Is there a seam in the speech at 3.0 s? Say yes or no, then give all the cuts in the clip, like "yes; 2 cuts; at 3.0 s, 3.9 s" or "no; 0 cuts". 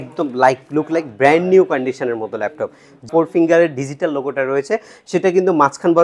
yes; 1 cut; at 3.0 s